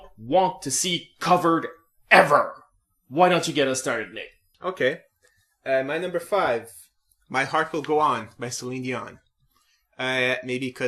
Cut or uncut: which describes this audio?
cut